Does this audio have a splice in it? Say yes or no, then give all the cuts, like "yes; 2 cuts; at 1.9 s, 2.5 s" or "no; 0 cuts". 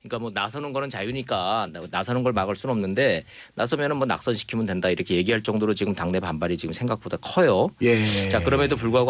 no; 0 cuts